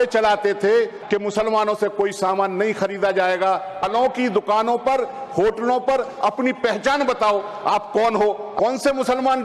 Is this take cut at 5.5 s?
no; 3 cuts; at 1.0 s, 3.7 s, 8.5 s

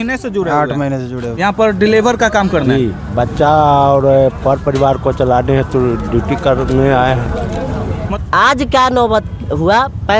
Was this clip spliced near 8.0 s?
yes; 2 cuts; at 1.2 s, 8.0 s

